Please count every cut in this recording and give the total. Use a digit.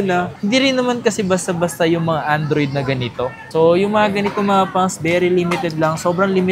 1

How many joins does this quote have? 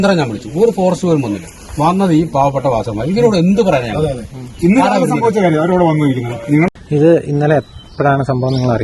1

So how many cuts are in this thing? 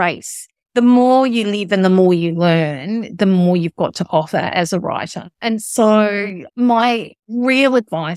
1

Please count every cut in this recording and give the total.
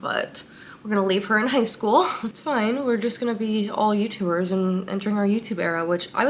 1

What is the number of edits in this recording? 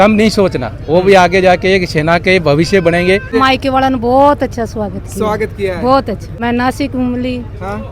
2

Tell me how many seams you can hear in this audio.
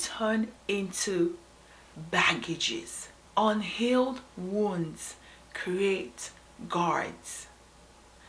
1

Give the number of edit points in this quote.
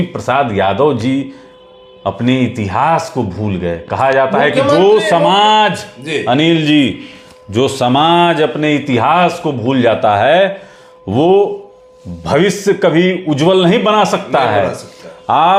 0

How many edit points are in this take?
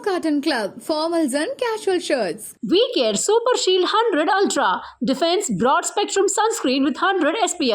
0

